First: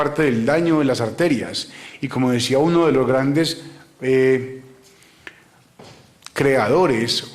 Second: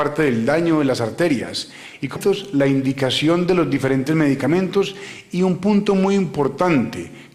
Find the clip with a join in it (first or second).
first